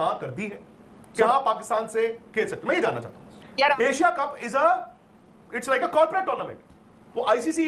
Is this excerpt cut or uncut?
cut